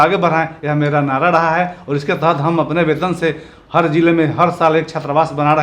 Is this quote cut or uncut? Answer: uncut